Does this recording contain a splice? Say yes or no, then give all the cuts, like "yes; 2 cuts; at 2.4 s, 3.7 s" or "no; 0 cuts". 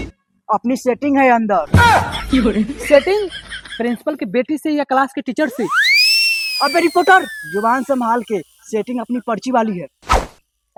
no; 0 cuts